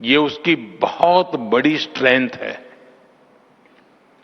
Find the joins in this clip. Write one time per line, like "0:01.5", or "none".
0:01.6